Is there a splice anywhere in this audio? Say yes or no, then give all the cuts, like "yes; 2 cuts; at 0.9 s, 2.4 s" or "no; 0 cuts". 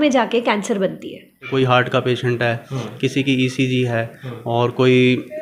yes; 1 cut; at 1.4 s